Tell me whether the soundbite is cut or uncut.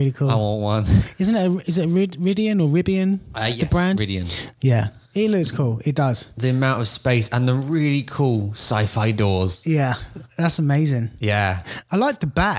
uncut